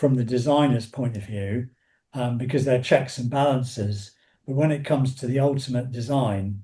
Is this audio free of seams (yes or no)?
yes